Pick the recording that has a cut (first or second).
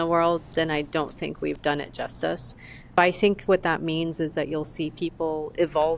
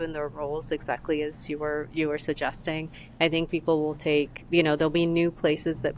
first